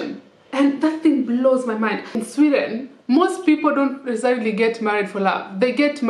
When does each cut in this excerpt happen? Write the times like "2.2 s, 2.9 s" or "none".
2.2 s